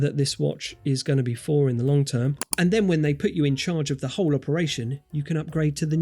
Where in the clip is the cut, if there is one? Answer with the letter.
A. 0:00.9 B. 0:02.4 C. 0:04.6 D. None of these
B